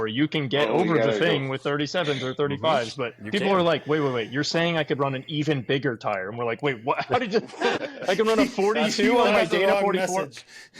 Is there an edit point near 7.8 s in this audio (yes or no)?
yes